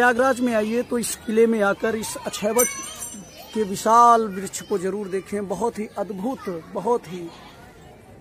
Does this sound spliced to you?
no; 0 cuts

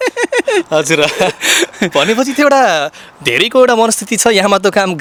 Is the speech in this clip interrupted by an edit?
no; 0 cuts

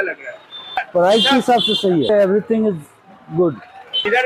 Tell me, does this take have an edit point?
yes; 2 cuts; at 0.9 s, 2.1 s

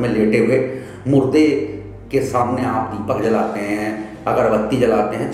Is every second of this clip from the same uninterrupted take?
yes; 0 cuts

